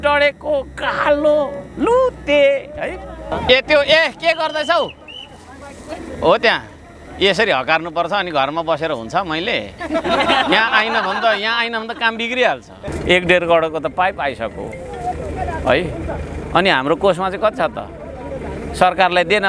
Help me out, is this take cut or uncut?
cut